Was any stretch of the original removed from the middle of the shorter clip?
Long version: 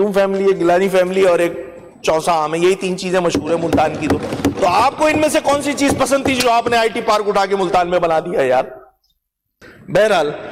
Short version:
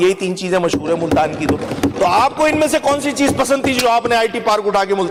no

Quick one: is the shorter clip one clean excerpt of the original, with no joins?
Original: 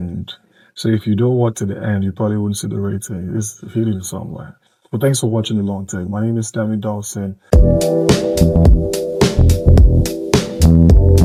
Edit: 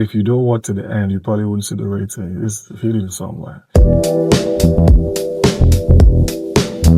no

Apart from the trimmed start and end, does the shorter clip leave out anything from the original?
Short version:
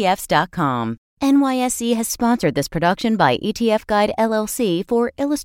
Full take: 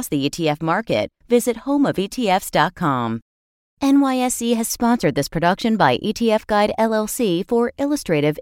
yes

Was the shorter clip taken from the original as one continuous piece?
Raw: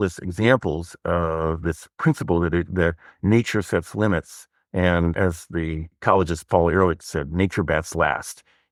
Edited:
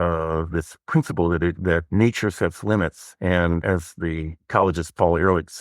no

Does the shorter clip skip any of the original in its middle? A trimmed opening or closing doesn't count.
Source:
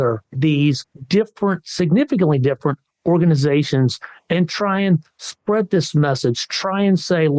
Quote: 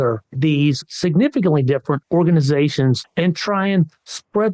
yes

